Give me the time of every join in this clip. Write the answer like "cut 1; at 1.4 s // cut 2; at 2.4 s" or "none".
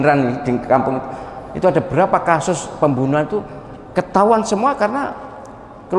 none